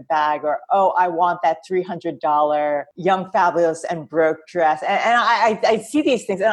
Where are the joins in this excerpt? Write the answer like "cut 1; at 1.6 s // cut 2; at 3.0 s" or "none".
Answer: cut 1; at 2.9 s